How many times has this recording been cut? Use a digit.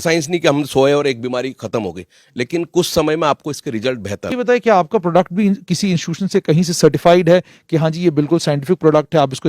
1